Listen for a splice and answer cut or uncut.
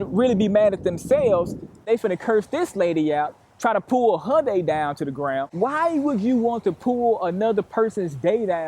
cut